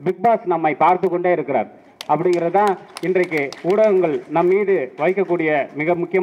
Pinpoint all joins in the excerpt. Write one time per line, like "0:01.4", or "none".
none